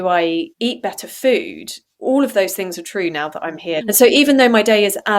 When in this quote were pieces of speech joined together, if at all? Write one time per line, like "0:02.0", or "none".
0:03.8